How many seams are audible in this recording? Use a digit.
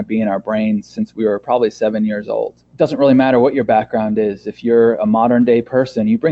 1